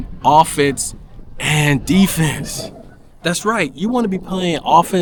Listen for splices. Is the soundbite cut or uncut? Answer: uncut